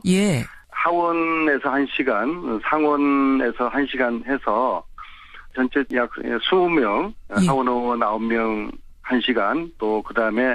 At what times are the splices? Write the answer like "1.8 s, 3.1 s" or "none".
7.6 s